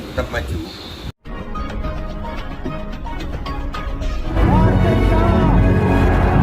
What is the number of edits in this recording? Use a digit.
1